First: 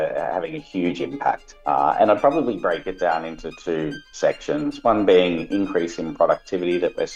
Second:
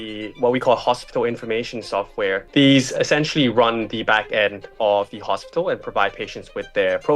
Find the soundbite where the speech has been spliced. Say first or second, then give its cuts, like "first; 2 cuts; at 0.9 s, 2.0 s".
second; 1 cut; at 2.4 s